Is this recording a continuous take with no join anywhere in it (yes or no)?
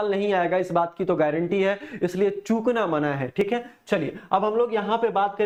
yes